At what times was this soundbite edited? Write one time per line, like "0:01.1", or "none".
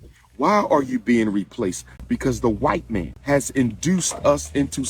0:01.9
0:03.1